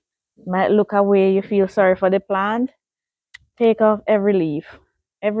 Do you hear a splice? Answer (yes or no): no